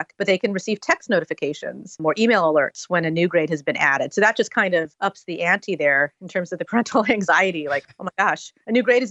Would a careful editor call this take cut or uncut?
cut